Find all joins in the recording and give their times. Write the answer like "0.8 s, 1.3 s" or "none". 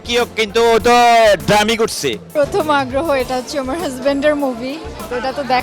2.2 s